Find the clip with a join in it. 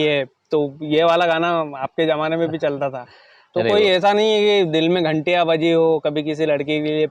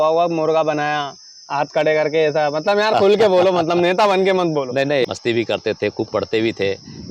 second; 1 cut; at 5.0 s

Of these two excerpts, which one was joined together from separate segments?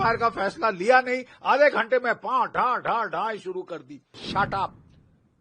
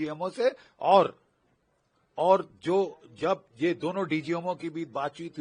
first; 1 cut; at 4.2 s

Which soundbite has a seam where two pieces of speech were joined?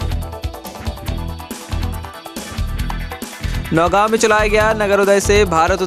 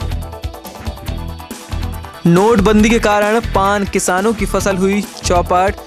second; 1 cut; at 2.2 s

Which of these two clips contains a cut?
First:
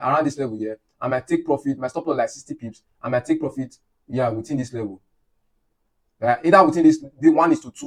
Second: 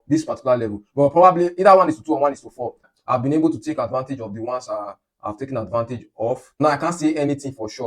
second; 2 cuts; at 2.9 s, 6.6 s

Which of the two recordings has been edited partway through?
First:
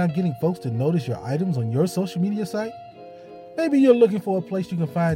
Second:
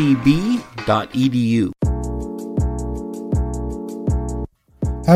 second; 1 cut; at 1.8 s

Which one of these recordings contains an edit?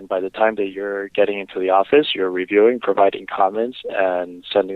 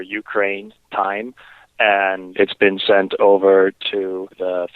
second; 2 cuts; at 2.2 s, 3.8 s

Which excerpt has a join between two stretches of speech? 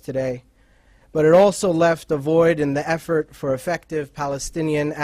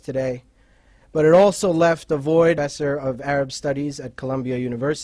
first; 1 cut; at 2.6 s

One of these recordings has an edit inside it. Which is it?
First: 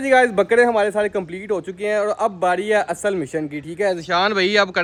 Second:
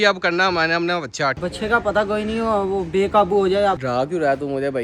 second; 2 cuts; at 1.4 s, 3.8 s

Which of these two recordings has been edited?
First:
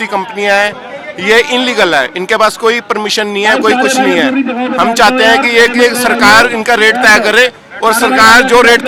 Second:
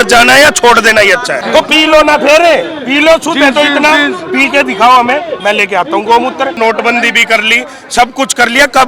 second; 2 cuts; at 1.5 s, 6.5 s

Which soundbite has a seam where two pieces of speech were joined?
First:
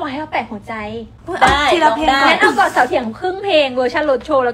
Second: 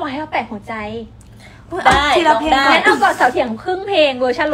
first; 1 cut; at 1.1 s

